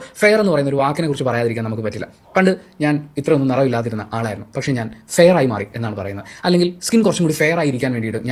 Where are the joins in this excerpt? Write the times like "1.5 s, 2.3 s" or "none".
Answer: none